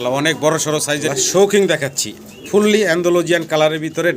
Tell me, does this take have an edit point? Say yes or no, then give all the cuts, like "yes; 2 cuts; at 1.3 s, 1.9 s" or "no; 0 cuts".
yes; 1 cut; at 1.0 s